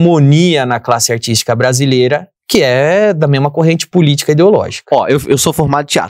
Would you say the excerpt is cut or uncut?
cut